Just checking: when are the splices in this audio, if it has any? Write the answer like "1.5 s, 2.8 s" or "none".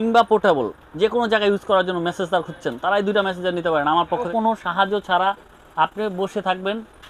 4.3 s